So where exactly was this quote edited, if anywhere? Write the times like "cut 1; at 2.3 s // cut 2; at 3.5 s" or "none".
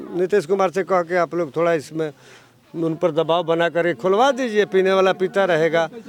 none

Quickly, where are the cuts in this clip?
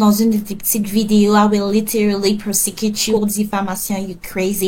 none

